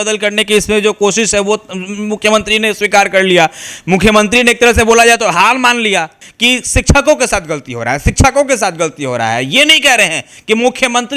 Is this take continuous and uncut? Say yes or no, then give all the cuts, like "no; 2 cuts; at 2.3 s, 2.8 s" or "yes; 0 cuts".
no; 1 cut; at 6.2 s